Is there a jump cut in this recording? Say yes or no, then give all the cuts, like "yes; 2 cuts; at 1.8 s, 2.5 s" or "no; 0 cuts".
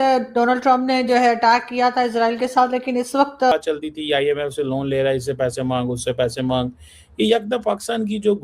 yes; 1 cut; at 3.5 s